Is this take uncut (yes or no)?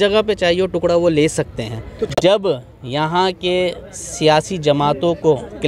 no